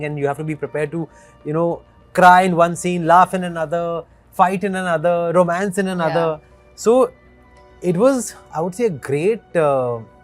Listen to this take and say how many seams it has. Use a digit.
0